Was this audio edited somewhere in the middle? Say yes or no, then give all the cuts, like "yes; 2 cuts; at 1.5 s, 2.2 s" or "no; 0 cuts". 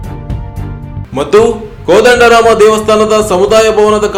no; 0 cuts